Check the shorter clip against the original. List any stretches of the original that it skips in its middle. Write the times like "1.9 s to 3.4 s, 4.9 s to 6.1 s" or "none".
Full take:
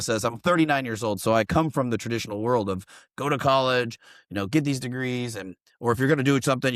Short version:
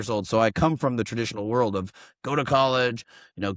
none